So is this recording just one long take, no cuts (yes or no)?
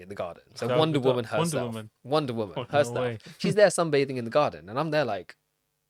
yes